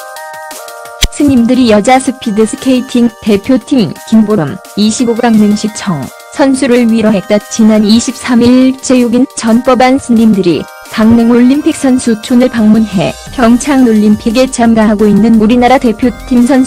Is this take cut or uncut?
uncut